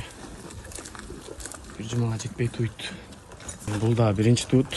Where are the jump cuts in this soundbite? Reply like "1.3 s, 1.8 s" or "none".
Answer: 3.7 s